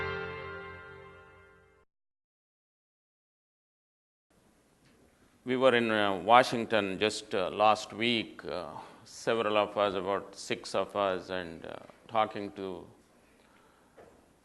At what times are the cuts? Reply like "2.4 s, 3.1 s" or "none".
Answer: 0.9 s